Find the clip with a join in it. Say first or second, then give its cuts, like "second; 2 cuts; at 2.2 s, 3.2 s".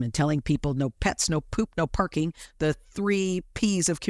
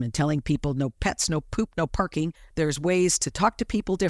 second; 1 cut; at 2.4 s